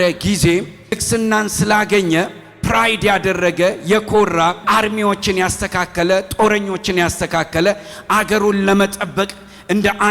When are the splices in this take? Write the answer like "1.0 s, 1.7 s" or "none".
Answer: 1.0 s, 4.6 s